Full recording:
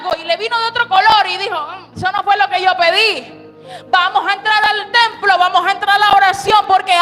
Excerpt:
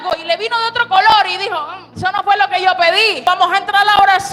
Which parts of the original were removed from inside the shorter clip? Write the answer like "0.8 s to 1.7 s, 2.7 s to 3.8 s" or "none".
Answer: 3.2 s to 5.4 s